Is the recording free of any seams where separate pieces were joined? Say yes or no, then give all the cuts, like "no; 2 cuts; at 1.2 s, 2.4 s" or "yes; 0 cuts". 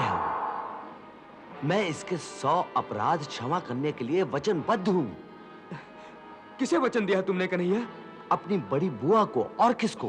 yes; 0 cuts